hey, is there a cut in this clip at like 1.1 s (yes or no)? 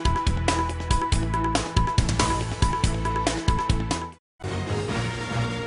no